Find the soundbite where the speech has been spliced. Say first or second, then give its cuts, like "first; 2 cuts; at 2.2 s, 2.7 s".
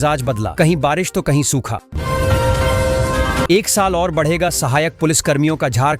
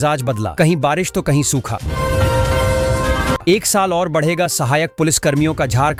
first; 2 cuts; at 1.9 s, 3.5 s